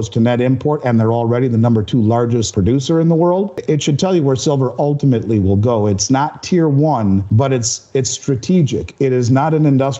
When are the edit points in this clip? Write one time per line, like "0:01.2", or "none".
0:02.5
0:03.6
0:07.3